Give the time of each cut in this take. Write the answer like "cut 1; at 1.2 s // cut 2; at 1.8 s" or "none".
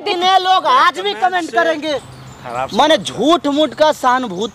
cut 1; at 2.1 s